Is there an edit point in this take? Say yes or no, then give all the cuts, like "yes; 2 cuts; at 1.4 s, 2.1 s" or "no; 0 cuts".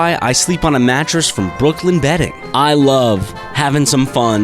yes; 1 cut; at 2.4 s